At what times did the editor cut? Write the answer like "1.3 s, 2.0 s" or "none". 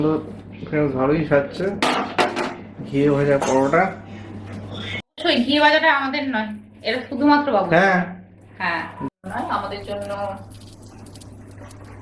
5.2 s, 9.1 s